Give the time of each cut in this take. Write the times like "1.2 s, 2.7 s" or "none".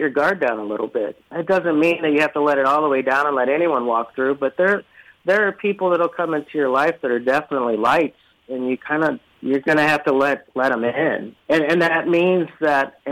1.3 s, 9.3 s, 11.3 s